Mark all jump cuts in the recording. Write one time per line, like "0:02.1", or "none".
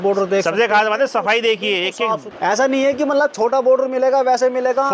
0:02.3